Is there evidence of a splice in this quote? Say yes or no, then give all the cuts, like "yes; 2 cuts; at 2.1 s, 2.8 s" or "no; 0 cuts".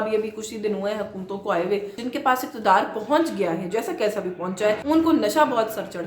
yes; 2 cuts; at 2.0 s, 4.8 s